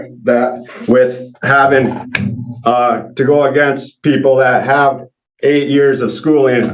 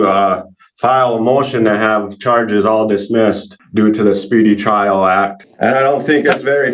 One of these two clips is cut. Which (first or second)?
second